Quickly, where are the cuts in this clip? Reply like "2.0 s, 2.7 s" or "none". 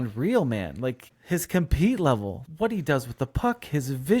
1.1 s, 2.4 s